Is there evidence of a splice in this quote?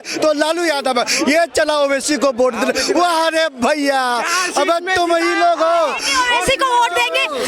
no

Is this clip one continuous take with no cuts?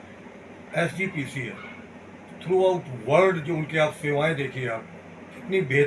yes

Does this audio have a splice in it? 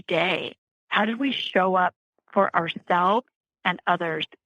yes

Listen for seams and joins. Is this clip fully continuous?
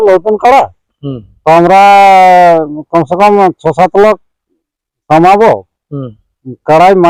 yes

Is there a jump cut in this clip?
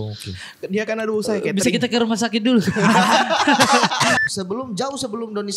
yes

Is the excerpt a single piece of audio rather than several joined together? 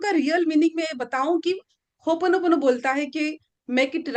yes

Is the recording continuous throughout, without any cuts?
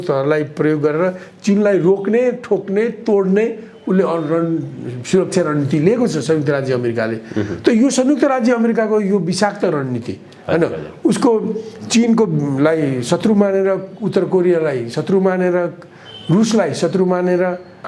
yes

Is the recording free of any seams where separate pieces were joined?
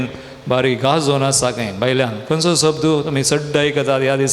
yes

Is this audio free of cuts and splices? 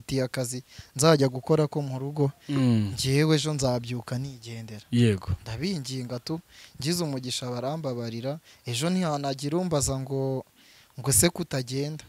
yes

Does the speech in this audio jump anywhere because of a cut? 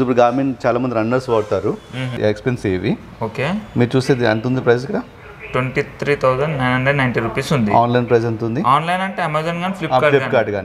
yes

